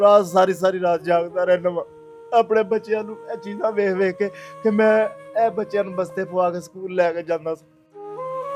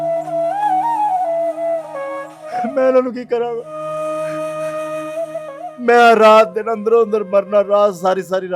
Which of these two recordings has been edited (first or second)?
second